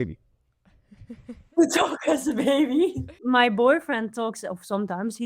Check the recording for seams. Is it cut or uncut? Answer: cut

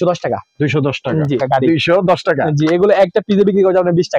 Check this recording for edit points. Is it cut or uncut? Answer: cut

